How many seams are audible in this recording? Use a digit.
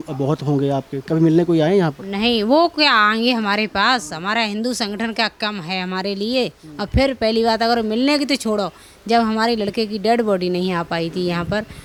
0